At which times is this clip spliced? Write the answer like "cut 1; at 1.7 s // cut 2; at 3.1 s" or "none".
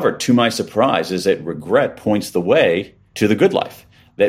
cut 1; at 3.0 s